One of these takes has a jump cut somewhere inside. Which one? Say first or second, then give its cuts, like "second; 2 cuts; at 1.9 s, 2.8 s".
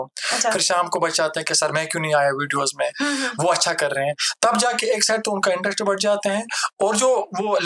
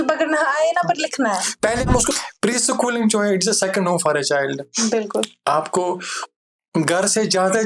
second; 1 cut; at 2.1 s